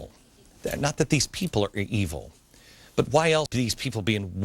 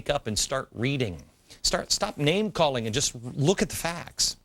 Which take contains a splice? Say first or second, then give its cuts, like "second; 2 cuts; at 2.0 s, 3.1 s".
first; 1 cut; at 3.5 s